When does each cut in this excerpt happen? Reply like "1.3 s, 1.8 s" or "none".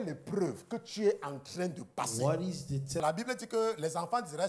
3.0 s